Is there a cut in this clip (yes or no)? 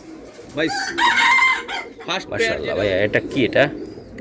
yes